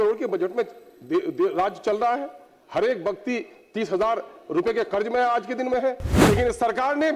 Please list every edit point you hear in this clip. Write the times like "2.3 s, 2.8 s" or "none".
6.1 s